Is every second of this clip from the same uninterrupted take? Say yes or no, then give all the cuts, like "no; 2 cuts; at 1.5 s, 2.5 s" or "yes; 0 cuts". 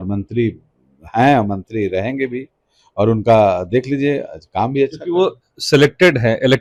yes; 0 cuts